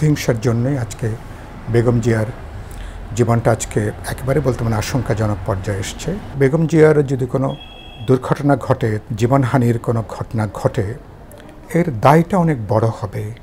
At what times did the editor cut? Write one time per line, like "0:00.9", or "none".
0:06.3
0:09.0